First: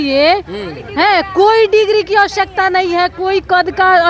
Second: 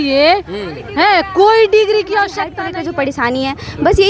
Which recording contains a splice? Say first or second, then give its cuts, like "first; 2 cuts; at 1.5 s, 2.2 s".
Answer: second; 1 cut; at 2.5 s